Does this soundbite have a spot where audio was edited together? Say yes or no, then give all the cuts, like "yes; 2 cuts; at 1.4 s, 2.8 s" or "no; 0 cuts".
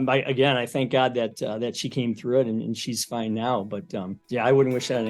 yes; 1 cut; at 4.2 s